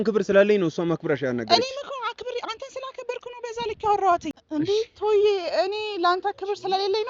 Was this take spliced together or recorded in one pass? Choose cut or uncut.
uncut